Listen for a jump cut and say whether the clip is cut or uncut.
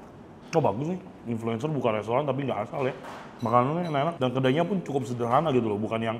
cut